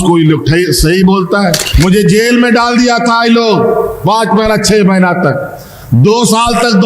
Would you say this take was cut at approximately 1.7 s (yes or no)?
yes